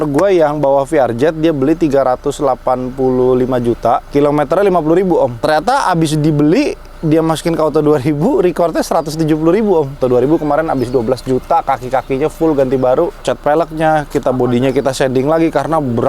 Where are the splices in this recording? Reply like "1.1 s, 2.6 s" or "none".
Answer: 5.4 s, 10.0 s, 13.2 s